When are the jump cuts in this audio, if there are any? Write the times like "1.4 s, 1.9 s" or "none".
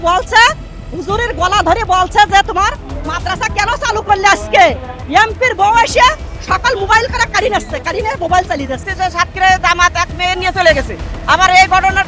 4.9 s, 8.9 s